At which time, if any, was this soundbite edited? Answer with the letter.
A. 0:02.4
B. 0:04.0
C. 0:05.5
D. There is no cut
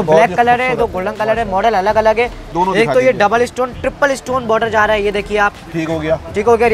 A